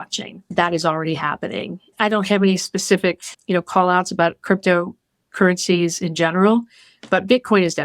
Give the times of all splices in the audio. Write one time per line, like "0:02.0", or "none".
0:01.9